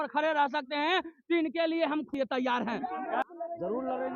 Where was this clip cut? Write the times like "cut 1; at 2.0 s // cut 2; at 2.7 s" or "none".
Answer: cut 1; at 3.2 s